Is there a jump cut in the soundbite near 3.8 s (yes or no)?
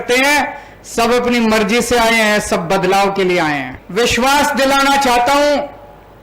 yes